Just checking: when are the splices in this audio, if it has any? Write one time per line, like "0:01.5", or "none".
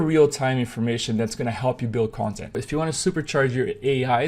0:02.5